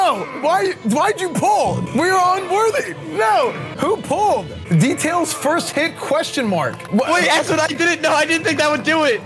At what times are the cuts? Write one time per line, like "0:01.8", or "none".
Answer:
0:01.8